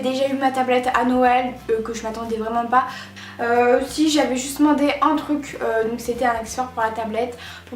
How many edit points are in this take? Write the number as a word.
one